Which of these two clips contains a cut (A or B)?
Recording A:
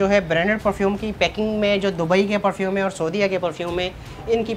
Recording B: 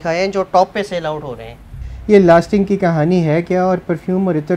B